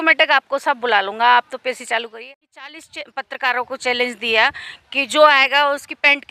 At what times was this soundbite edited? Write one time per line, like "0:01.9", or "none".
0:02.1